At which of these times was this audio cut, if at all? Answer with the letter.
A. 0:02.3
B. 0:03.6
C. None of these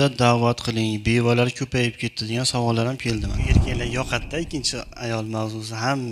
B